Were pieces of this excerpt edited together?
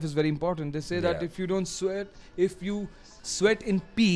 no; 0 cuts

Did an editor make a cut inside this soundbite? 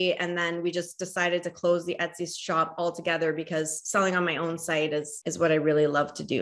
yes; 1 cut; at 5.2 s

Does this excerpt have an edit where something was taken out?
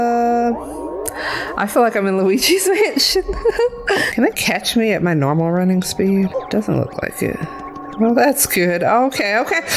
yes; 2 cuts; at 4.1 s, 6.3 s

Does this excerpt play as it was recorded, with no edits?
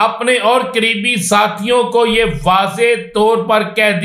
yes; 0 cuts

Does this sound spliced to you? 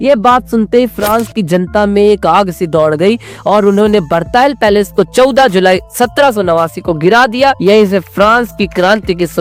no; 0 cuts

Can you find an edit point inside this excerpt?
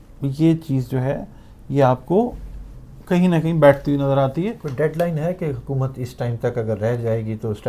yes; 1 cut; at 4.6 s

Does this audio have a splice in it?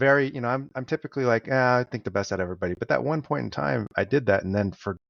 no; 0 cuts

